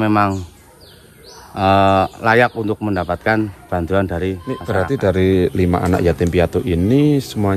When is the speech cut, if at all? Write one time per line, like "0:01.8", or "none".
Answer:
0:04.7